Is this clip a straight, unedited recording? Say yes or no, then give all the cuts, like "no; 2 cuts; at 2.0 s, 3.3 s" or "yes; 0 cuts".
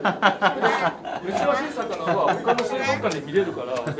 yes; 0 cuts